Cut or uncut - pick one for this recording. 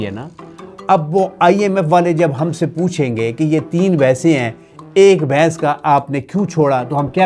uncut